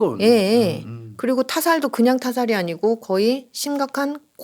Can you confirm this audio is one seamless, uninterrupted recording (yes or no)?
yes